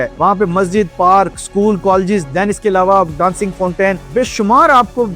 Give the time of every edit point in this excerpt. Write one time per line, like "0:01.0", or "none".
none

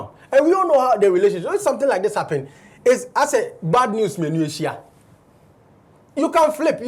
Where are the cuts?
none

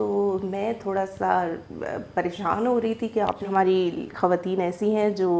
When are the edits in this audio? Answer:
0:03.4

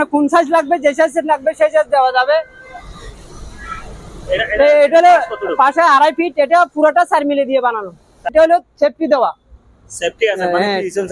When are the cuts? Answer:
0:08.3

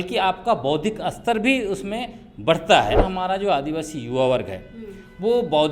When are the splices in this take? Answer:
0:03.0

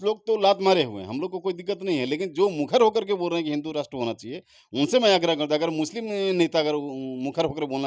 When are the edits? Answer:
none

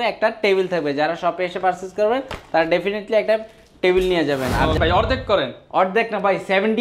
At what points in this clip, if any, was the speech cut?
0:04.8

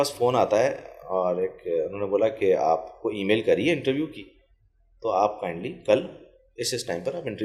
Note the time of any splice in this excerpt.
none

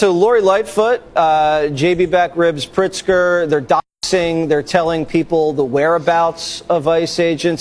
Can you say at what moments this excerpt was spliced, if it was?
none

